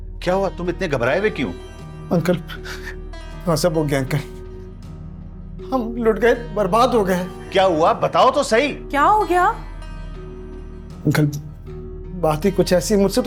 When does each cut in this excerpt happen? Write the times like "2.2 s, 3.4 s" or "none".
none